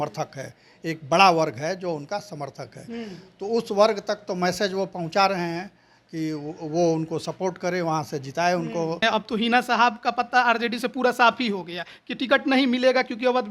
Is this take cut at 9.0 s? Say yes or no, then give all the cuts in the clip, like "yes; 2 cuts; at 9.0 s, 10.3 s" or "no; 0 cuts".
yes; 1 cut; at 9.0 s